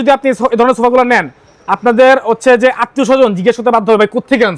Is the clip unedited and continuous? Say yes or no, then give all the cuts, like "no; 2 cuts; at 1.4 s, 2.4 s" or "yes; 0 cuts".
yes; 0 cuts